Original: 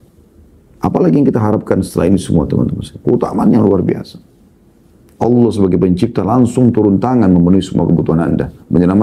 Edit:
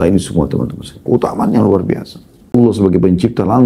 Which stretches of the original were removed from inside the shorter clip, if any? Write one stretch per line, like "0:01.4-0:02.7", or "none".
0:04.5-0:05.3